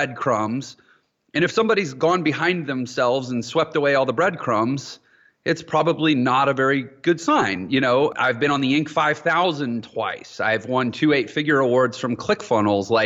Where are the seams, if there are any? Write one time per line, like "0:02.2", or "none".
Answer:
0:08.1